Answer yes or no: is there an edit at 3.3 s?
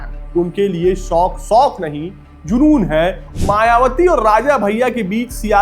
yes